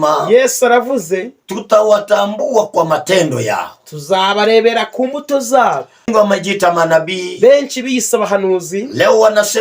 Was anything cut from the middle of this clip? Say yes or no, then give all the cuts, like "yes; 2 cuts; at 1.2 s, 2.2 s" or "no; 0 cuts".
yes; 1 cut; at 6.1 s